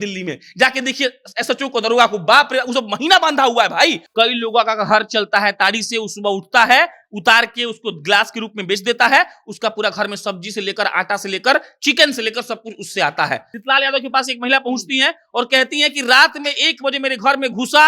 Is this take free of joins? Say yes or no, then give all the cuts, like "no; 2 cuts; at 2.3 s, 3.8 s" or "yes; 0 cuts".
no; 2 cuts; at 4.0 s, 13.4 s